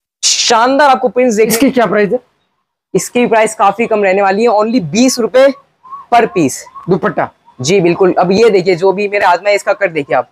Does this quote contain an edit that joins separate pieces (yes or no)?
yes